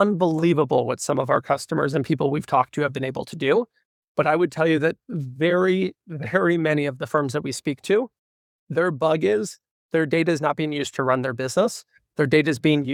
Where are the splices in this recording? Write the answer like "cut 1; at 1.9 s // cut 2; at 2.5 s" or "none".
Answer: none